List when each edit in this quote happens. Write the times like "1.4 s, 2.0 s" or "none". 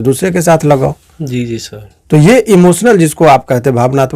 none